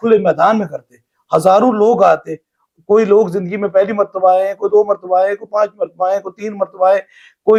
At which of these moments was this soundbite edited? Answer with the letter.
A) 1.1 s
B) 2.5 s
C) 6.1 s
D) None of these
D